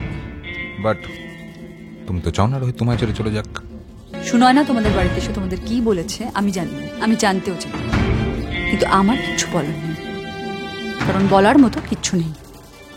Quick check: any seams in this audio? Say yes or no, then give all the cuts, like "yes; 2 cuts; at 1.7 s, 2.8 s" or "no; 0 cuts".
yes; 1 cut; at 4.1 s